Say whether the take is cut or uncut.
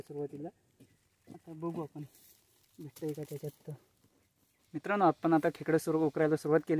cut